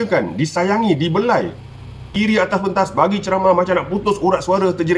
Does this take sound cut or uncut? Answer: cut